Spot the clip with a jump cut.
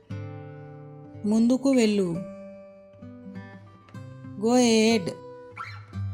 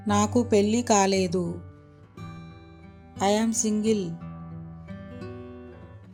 first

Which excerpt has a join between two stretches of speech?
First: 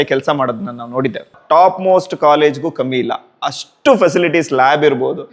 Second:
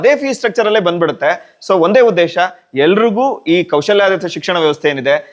first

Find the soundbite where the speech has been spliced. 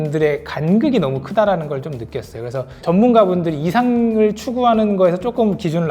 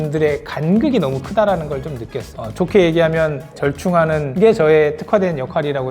second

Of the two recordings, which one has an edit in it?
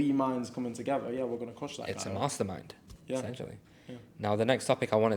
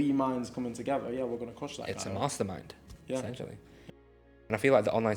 second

